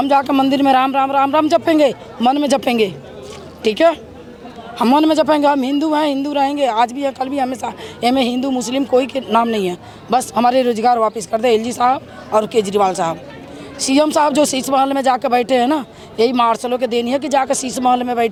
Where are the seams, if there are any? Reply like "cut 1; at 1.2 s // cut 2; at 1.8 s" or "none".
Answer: none